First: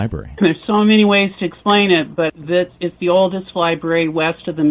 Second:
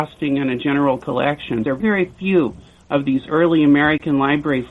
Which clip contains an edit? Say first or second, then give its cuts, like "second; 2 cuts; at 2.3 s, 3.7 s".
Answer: second; 1 cut; at 1.7 s